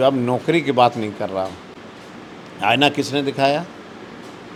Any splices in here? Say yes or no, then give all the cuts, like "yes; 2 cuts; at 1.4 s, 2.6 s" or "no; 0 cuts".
no; 0 cuts